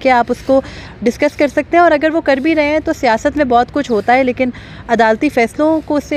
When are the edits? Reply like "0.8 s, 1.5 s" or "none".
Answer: none